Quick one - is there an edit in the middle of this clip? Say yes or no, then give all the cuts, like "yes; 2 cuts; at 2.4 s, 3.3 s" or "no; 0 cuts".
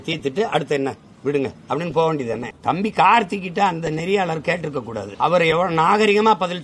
yes; 2 cuts; at 2.5 s, 5.1 s